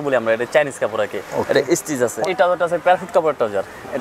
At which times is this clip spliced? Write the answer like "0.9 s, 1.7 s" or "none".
2.2 s